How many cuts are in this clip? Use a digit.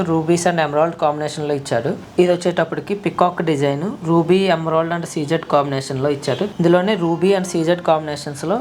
2